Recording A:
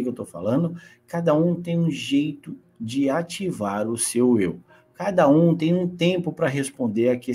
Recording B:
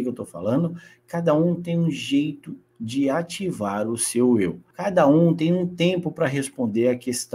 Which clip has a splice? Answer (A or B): B